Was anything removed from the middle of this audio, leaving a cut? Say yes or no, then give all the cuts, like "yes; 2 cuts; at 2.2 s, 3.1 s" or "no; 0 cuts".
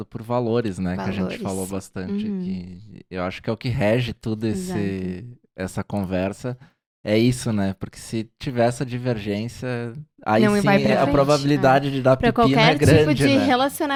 no; 0 cuts